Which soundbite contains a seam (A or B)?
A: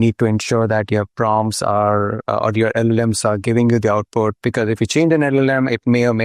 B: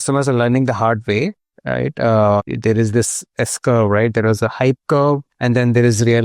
B